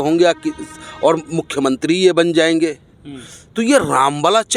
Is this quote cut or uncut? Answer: uncut